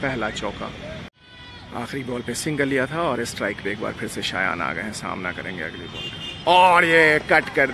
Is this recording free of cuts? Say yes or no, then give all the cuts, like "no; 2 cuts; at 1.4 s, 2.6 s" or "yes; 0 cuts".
no; 1 cut; at 1.1 s